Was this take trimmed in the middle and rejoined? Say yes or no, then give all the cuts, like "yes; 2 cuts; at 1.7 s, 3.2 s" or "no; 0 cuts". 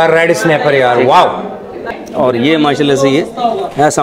yes; 1 cut; at 1.9 s